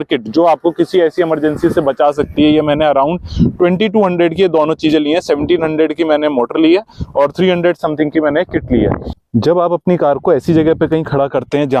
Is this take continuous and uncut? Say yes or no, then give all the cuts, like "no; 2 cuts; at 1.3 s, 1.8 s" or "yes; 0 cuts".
no; 1 cut; at 9.1 s